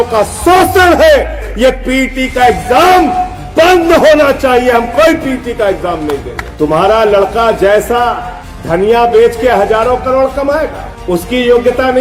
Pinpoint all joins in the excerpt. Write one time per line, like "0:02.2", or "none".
0:01.4
0:06.4